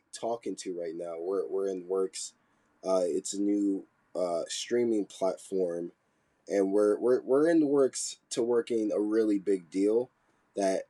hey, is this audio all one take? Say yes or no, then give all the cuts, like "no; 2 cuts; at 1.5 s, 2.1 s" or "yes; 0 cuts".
yes; 0 cuts